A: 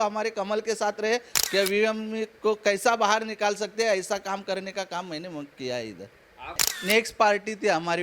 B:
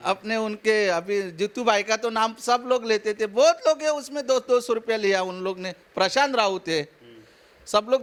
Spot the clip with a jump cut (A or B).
A